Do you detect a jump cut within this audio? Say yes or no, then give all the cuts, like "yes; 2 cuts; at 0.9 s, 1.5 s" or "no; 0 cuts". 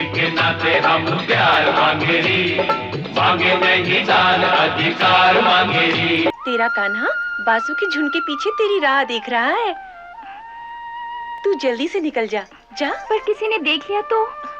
yes; 3 cuts; at 6.3 s, 11.4 s, 13.0 s